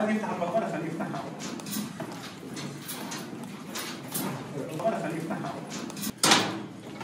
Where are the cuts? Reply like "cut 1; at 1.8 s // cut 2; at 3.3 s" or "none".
cut 1; at 6.1 s